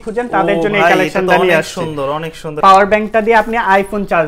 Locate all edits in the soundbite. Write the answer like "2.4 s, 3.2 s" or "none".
2.5 s